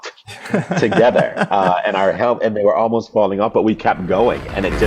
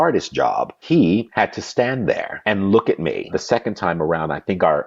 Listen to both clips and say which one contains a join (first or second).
second